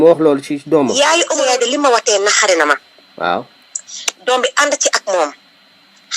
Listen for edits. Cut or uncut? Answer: cut